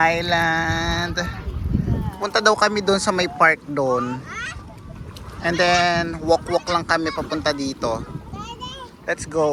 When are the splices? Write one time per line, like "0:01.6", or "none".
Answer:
none